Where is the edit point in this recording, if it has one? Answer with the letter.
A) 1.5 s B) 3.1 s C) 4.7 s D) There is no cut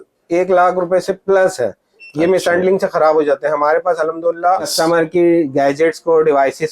C